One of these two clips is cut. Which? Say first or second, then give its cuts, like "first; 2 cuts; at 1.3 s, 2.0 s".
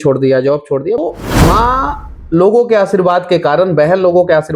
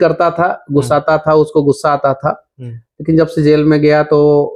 first; 1 cut; at 1.0 s